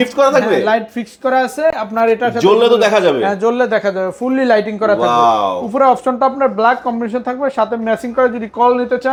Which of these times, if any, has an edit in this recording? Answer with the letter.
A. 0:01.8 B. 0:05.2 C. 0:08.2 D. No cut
D